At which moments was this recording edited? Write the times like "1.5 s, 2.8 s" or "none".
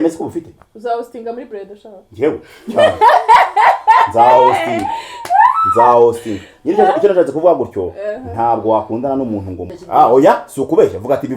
9.7 s